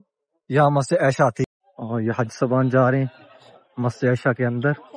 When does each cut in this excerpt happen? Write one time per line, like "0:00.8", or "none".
0:01.5

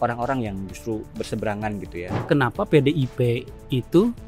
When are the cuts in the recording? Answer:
0:02.2

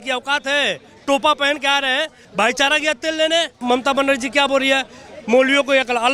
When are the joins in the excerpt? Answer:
0:02.2
0:03.6

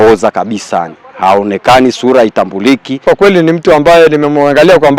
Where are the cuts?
0:02.9

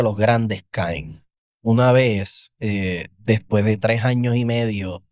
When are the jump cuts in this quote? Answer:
none

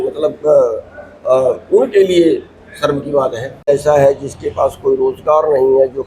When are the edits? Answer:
0:03.7

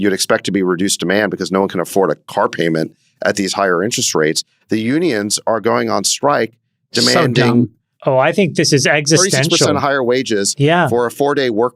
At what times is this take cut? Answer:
none

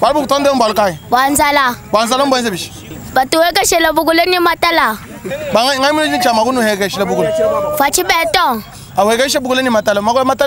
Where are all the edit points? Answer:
none

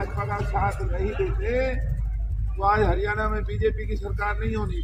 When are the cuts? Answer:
none

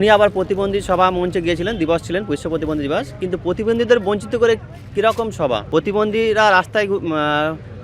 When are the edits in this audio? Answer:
0:05.6

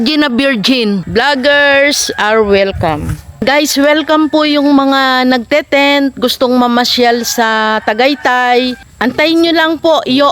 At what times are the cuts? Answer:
0:01.0
0:03.4
0:08.9

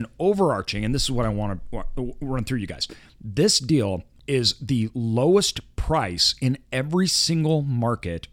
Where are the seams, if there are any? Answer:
0:04.1

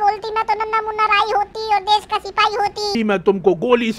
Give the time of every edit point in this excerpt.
0:02.9

